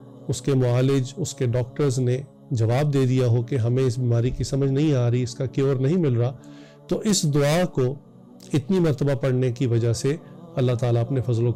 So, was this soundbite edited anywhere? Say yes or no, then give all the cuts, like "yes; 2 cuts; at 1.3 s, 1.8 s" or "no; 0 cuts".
no; 0 cuts